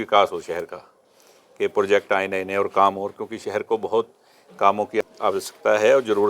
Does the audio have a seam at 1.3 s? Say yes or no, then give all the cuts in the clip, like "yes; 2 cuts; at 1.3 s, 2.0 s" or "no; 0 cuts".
no; 1 cut; at 5.0 s